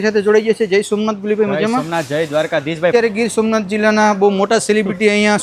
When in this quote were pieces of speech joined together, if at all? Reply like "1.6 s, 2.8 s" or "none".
2.9 s